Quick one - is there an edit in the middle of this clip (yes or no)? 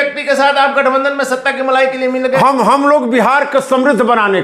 no